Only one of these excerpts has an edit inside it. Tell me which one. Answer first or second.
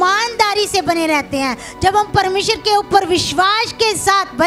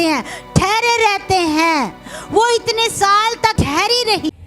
second